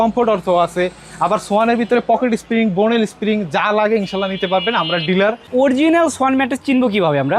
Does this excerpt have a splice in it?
yes; 1 cut; at 5.4 s

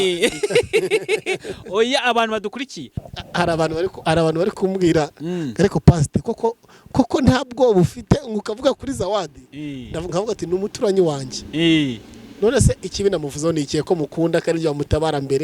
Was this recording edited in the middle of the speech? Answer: yes; 1 cut; at 3.0 s

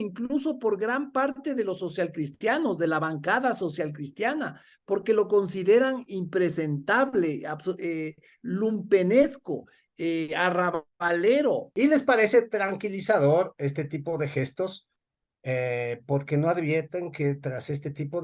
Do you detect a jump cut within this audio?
yes; 1 cut; at 11.7 s

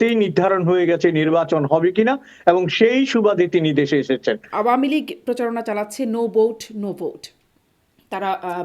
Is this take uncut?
no; 1 cut; at 4.5 s

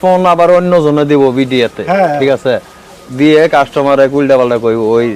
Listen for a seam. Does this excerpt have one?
no; 0 cuts

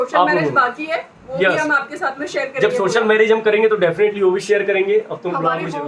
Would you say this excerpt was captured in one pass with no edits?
yes; 0 cuts

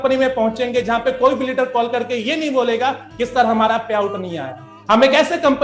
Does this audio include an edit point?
no; 0 cuts

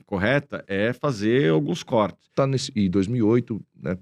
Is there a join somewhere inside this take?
yes; 1 cut; at 2.3 s

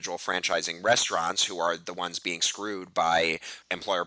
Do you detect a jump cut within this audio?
no; 0 cuts

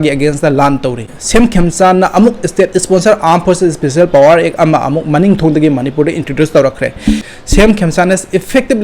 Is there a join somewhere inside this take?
yes; 2 cuts; at 1.1 s, 7.3 s

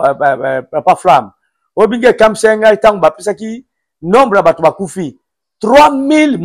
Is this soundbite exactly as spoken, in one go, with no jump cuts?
yes; 0 cuts

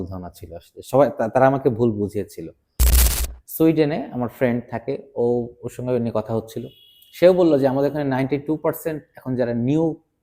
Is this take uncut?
no; 1 cut; at 2.8 s

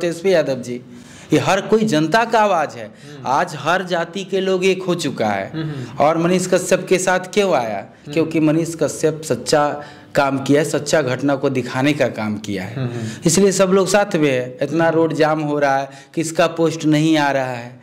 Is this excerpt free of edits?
yes; 0 cuts

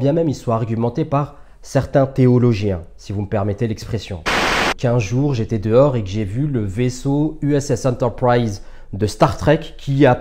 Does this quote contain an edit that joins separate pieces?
yes; 1 cut; at 4.4 s

